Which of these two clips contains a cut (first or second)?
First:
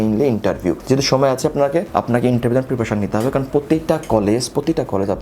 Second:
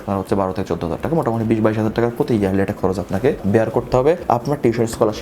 second